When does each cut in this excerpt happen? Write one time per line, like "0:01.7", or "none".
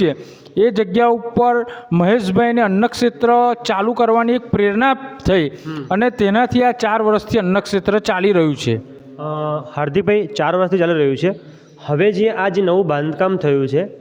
none